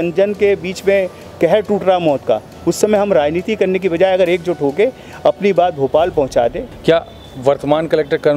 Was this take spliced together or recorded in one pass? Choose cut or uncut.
cut